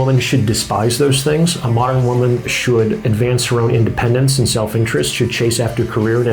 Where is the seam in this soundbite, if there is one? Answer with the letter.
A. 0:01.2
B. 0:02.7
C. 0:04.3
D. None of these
D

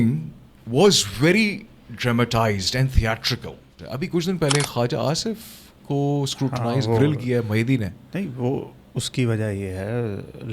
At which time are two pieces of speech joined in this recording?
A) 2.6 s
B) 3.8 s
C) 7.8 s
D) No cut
B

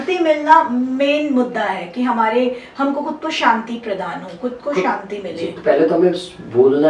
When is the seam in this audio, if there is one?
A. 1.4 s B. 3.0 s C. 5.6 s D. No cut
C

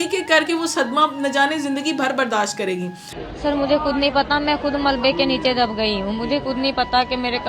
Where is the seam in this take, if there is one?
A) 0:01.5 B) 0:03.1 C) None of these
B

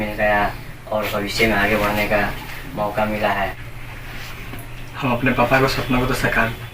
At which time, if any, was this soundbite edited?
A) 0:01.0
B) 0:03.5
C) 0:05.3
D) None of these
B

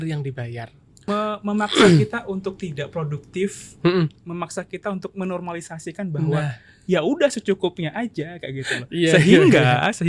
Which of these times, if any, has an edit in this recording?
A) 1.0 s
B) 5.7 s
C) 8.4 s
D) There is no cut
A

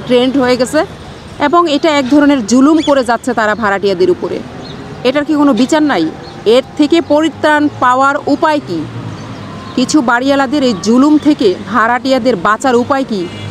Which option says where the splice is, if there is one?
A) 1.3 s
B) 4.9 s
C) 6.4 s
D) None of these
D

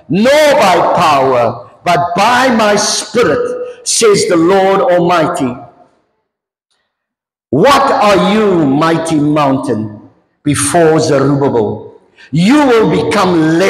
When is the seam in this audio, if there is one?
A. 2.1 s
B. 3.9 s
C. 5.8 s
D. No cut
D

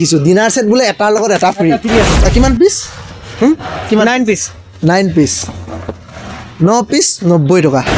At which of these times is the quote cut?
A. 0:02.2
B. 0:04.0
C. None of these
A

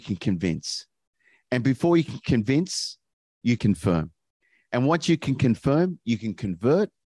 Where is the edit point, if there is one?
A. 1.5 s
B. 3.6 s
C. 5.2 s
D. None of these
B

